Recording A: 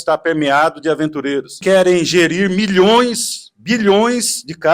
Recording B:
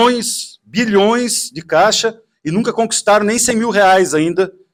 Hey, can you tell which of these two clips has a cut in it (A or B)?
A